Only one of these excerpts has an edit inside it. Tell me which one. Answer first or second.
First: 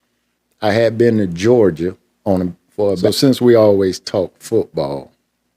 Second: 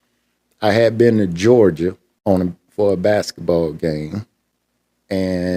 first